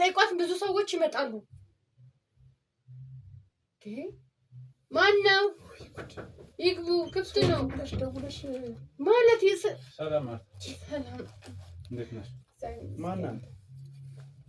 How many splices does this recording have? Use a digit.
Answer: 0